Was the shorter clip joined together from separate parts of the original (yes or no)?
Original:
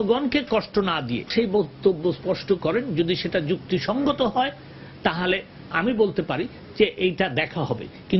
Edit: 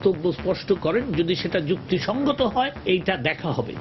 yes